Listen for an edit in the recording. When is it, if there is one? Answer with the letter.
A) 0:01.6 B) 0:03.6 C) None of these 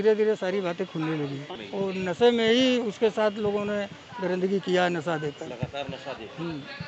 A